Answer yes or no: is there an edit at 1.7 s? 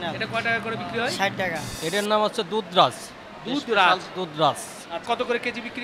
yes